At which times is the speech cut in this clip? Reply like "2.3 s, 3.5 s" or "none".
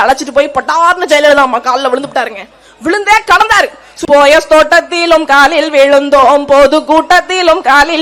3.9 s